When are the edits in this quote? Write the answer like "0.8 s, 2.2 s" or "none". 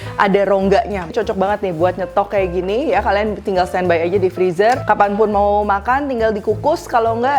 1.1 s, 4.8 s